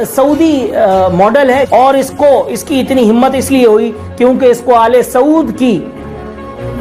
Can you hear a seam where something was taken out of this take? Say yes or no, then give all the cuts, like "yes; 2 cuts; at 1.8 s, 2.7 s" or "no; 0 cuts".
yes; 1 cut; at 1.7 s